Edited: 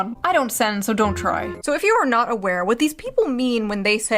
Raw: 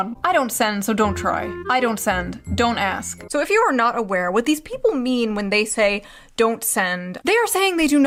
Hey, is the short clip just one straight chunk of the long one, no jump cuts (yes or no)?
no